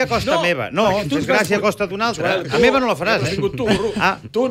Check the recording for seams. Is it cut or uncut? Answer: uncut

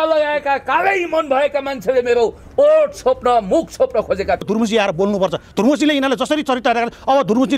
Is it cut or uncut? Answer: cut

